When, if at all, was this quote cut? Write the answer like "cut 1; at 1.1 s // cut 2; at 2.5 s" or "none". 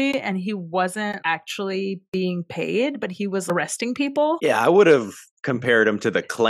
cut 1; at 1.2 s // cut 2; at 3.4 s